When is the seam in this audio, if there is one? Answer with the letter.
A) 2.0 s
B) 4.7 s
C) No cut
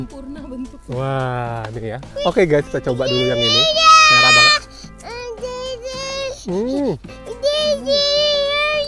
A